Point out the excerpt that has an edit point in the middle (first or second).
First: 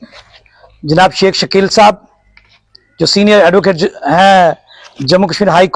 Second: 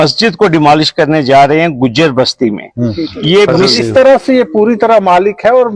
second